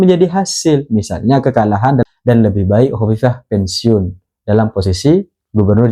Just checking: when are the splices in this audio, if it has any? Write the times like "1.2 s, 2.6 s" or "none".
2.0 s